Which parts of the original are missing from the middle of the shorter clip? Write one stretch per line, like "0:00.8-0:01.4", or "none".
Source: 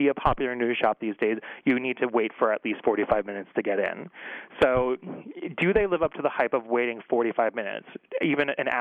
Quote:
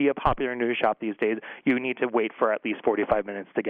none

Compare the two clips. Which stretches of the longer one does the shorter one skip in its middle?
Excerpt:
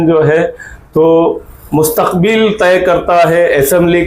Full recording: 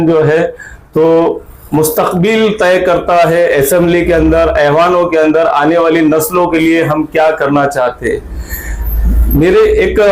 none

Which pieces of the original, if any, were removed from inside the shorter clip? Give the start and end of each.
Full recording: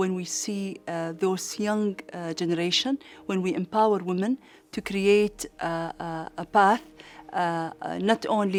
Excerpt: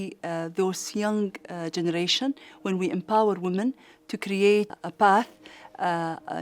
0:05.4-0:06.4

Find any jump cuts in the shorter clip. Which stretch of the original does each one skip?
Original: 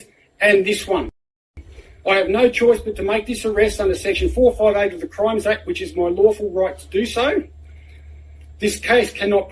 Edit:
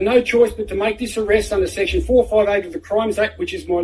none

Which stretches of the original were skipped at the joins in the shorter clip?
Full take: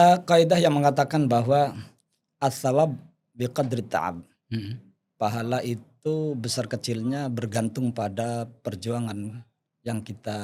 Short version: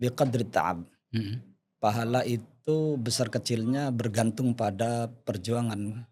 none

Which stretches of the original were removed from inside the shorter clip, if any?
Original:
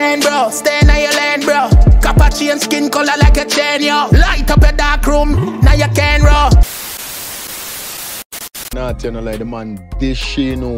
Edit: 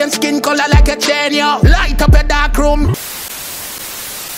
0:05.4-0:06.6

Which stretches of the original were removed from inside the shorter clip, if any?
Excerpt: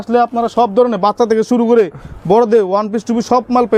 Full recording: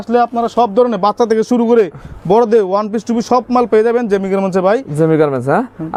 none

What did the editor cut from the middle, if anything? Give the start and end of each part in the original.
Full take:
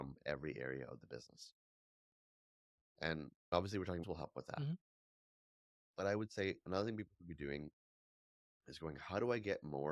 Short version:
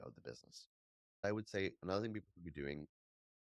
0:02.1-0:06.1

